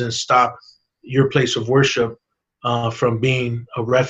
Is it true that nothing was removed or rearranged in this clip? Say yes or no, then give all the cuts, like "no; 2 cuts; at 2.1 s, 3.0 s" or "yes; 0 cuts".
yes; 0 cuts